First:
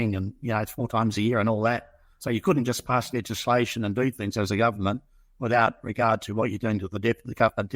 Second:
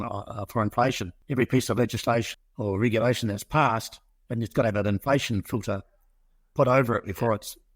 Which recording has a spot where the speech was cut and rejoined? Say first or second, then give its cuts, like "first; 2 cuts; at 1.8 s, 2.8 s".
second; 2 cuts; at 1.1 s, 2.3 s